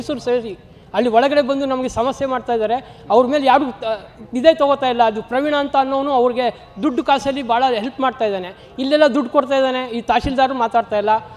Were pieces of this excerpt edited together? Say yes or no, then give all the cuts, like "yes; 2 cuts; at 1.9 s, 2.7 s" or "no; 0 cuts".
no; 0 cuts